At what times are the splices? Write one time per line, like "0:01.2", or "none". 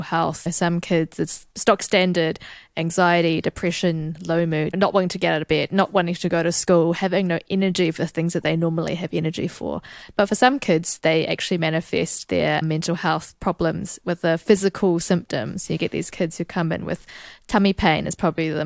0:01.4